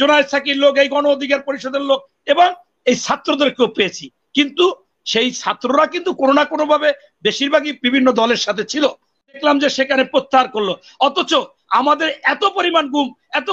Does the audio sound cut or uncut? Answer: cut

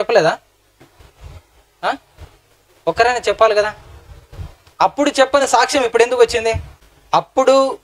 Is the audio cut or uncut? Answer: cut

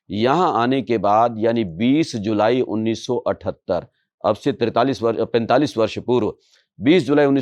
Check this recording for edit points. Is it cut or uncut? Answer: uncut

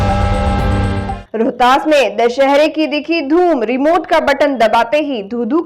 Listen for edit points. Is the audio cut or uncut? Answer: cut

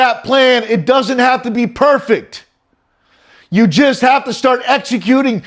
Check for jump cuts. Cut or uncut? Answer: uncut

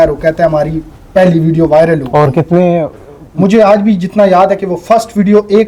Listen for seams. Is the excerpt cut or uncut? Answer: uncut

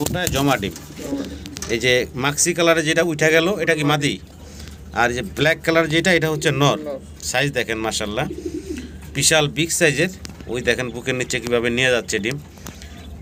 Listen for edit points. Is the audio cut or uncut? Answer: uncut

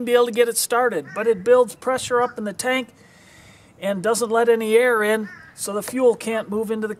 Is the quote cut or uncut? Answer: uncut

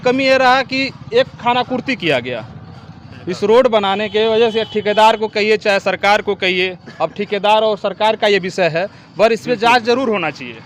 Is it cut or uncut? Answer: uncut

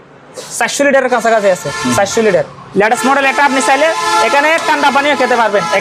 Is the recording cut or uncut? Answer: uncut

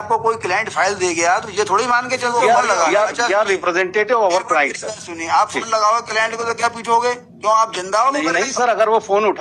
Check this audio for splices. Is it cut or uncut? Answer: cut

